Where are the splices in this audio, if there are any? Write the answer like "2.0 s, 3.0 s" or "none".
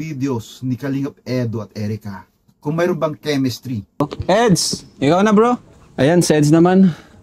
4.0 s

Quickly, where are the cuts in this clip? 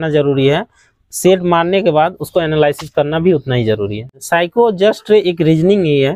4.1 s

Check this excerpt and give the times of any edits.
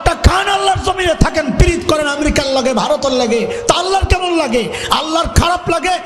none

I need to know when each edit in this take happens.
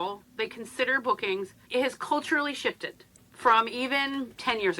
1.6 s

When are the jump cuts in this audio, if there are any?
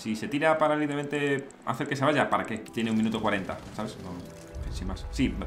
1.6 s, 2.6 s

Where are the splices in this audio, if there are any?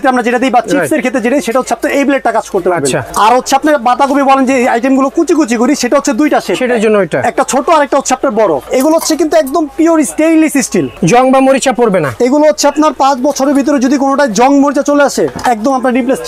3.1 s, 8.7 s, 10.9 s

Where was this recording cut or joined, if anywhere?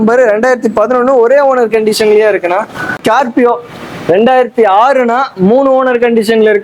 2.9 s

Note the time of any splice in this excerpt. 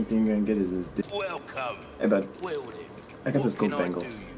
1.1 s

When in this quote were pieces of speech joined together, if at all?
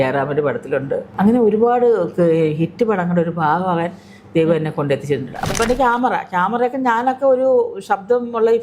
1.1 s, 5.5 s

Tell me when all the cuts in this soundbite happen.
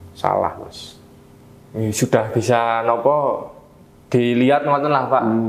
none

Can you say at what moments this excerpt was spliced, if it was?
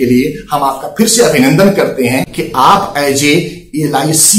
2.4 s

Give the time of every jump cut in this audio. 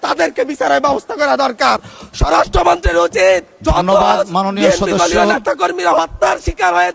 none

